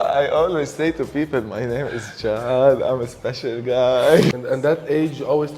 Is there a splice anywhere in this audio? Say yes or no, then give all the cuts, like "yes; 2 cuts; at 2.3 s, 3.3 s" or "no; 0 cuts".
yes; 1 cut; at 4.3 s